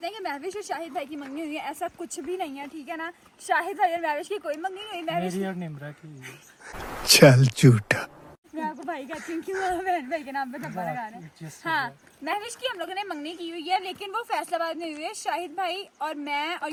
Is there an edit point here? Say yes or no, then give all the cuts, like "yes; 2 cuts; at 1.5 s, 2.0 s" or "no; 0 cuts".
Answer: no; 0 cuts